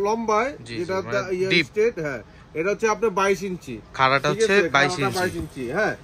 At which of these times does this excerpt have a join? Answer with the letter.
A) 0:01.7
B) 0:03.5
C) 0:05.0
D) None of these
D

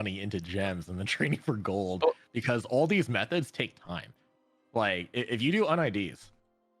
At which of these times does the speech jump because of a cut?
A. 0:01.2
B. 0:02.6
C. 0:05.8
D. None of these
D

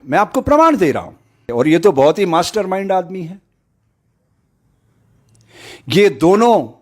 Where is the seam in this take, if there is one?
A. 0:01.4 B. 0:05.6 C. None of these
A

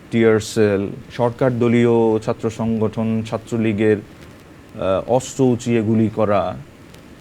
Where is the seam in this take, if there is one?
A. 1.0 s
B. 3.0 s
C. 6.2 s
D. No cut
A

